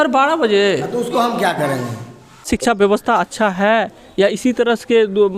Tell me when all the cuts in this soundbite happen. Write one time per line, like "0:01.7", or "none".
0:02.5